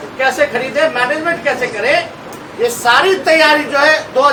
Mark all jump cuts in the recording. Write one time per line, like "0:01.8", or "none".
none